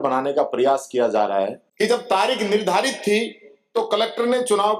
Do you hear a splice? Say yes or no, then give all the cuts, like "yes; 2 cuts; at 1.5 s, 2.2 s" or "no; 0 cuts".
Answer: yes; 1 cut; at 1.6 s